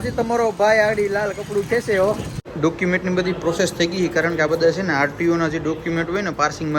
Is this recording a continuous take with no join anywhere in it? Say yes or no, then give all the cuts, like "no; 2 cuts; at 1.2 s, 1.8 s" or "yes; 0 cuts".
yes; 0 cuts